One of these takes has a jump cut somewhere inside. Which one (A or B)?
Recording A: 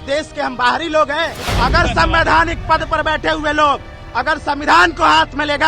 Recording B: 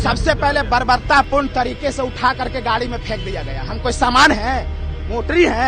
A